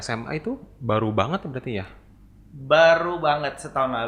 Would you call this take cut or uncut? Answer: uncut